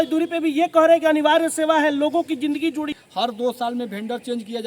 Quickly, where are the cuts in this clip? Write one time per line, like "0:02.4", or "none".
0:02.9